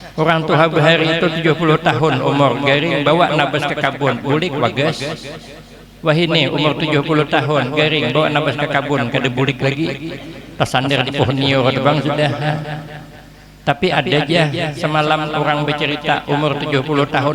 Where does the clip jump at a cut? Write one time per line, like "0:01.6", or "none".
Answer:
none